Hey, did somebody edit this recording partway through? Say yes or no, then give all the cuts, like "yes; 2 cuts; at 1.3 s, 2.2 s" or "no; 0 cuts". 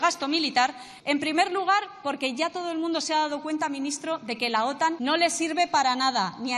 yes; 2 cuts; at 0.9 s, 5.0 s